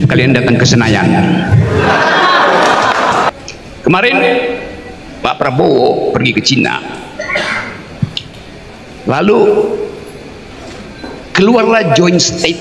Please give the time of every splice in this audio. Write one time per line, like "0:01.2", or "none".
0:03.3